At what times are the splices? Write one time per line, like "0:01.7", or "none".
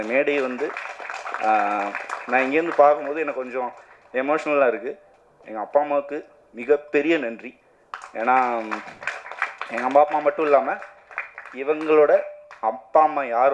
none

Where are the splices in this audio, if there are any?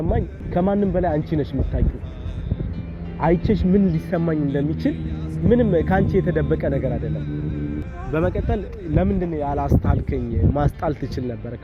none

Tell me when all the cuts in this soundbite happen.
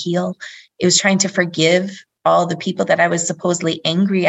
none

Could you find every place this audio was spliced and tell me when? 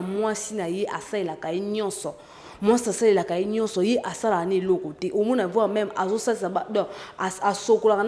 none

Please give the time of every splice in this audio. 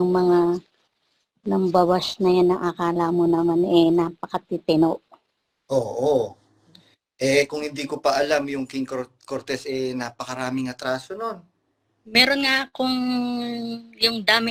none

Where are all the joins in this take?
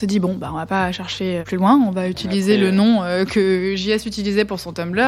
0:01.4

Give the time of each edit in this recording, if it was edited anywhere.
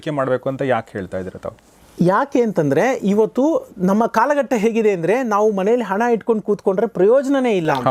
none

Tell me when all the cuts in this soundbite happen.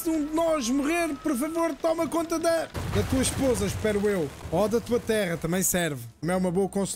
0:02.8
0:04.4
0:06.1

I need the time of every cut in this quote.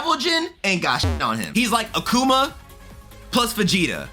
0:01.5

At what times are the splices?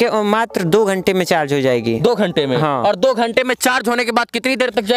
none

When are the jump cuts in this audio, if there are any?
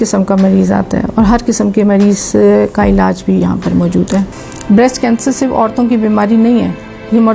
0:04.3

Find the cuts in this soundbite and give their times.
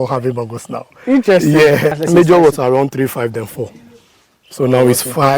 0:02.0

